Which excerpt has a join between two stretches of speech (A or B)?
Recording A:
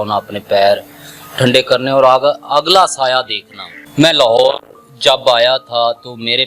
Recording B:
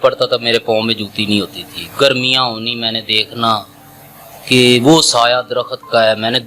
A